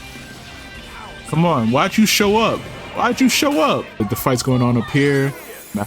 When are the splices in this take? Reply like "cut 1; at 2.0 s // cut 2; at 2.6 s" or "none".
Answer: cut 1; at 4.0 s